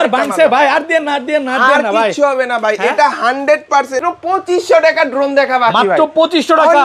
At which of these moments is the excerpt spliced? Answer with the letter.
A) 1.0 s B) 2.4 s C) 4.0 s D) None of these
C